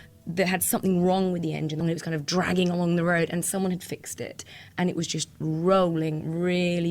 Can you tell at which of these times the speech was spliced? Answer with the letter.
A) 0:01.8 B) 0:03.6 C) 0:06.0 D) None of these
A